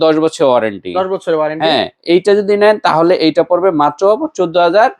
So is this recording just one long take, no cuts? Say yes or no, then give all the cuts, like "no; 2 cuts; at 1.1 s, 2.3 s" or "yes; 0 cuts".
yes; 0 cuts